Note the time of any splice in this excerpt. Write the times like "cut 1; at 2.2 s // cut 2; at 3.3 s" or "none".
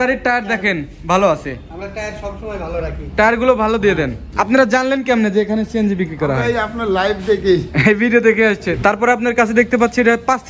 cut 1; at 4.2 s // cut 2; at 8.7 s